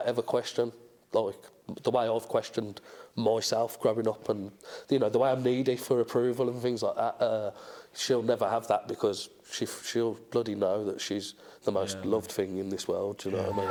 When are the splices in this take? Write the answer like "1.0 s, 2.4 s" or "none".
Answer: none